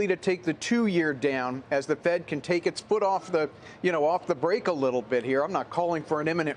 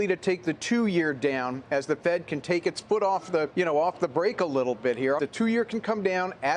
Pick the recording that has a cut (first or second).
second